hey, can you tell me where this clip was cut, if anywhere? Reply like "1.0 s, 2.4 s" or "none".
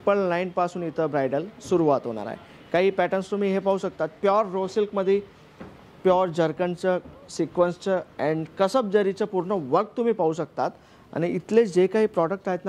none